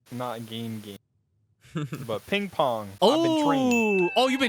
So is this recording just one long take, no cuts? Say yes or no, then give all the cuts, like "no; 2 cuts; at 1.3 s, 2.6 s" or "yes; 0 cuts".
no; 1 cut; at 2.4 s